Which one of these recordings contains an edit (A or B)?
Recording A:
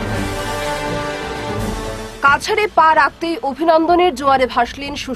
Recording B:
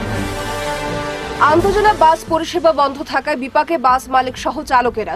B